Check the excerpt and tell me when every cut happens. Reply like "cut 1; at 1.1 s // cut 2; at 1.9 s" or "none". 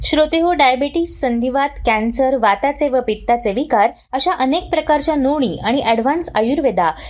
none